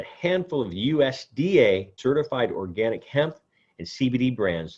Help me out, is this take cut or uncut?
cut